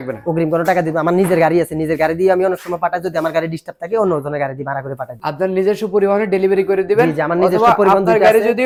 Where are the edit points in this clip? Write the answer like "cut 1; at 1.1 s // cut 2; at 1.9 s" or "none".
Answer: none